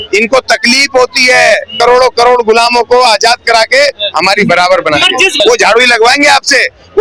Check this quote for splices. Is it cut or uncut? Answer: cut